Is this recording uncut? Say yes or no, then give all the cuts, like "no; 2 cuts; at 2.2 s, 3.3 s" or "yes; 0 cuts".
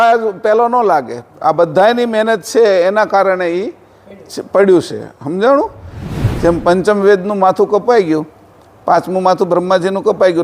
no; 1 cut; at 6.0 s